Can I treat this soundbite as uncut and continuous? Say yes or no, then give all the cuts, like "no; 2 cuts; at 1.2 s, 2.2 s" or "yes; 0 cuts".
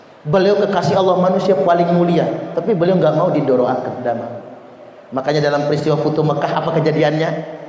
yes; 0 cuts